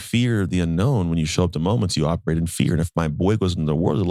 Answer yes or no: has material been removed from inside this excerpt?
no